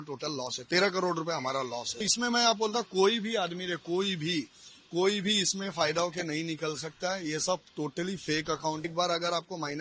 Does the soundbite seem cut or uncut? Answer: cut